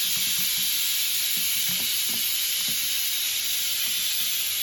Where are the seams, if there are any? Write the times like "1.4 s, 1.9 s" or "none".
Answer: none